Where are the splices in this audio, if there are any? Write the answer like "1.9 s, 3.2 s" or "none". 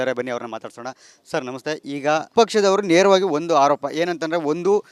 2.3 s